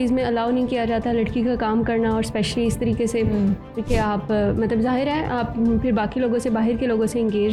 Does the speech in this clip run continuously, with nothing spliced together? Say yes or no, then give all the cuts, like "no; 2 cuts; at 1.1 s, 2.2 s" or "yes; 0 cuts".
yes; 0 cuts